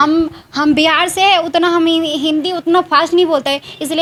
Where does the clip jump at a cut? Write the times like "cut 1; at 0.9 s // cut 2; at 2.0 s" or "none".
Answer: none